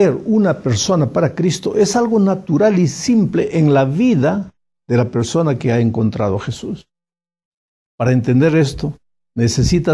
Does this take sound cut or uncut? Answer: uncut